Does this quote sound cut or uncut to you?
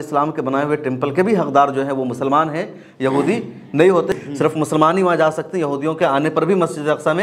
cut